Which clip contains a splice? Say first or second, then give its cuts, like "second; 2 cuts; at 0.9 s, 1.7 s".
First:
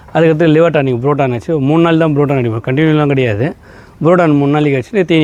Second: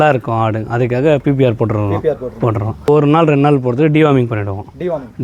second; 1 cut; at 2.9 s